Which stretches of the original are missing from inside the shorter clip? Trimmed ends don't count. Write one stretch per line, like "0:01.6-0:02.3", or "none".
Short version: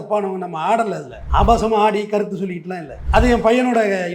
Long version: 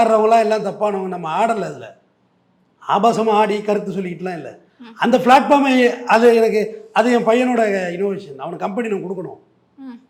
0:01.8-0:02.7
0:04.5-0:06.8